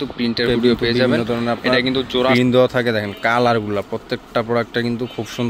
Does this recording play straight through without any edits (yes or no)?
no